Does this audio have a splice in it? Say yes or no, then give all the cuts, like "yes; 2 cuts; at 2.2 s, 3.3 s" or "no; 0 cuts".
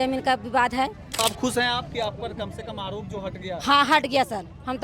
yes; 1 cut; at 1.2 s